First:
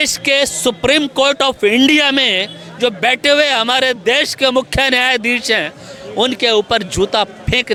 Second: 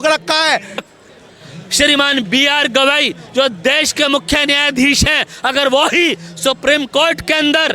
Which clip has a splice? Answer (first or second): second